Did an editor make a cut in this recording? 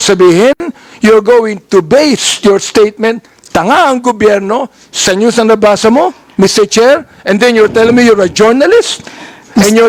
no; 0 cuts

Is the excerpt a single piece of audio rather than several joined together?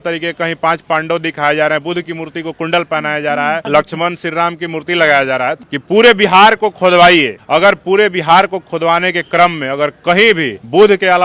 no; 3 cuts; at 3.6 s, 5.6 s, 7.4 s

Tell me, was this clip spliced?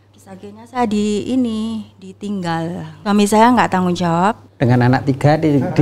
yes; 2 cuts; at 2.9 s, 4.5 s

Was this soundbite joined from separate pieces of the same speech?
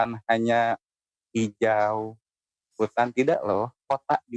no; 0 cuts

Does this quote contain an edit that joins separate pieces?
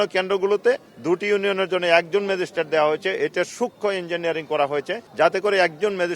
yes; 2 cuts; at 0.9 s, 5.0 s

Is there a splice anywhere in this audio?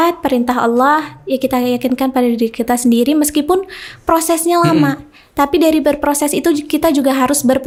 no; 0 cuts

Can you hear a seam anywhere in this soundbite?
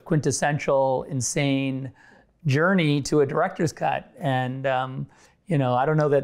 no; 0 cuts

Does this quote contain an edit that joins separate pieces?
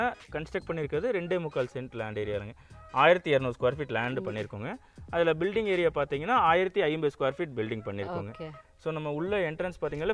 no; 0 cuts

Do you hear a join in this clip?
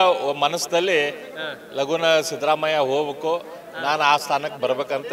no; 0 cuts

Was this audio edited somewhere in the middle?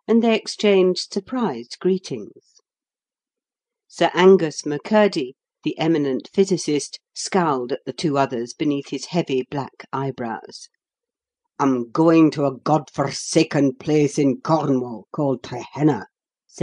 no; 0 cuts

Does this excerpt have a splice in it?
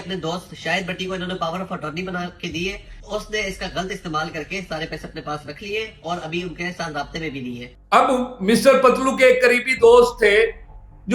yes; 2 cuts; at 2.9 s, 7.6 s

